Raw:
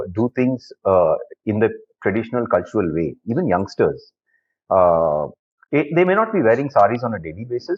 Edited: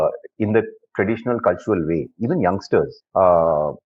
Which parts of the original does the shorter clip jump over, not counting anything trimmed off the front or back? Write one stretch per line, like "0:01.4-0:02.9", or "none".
0:04.1-0:04.5